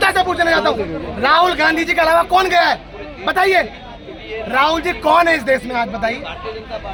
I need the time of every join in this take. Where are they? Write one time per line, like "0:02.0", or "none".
none